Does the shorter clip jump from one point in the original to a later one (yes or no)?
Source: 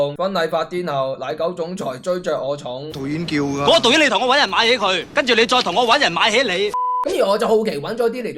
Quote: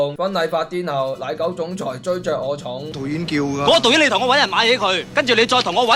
no